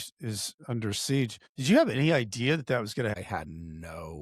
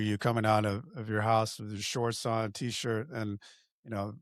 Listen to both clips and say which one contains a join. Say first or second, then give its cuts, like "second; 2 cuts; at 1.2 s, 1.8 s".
first; 2 cuts; at 1.5 s, 3.1 s